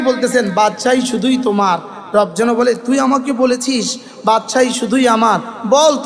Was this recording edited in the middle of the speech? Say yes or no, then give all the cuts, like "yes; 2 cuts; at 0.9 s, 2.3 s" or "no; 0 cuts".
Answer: no; 0 cuts